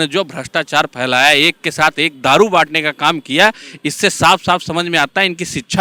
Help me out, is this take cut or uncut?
uncut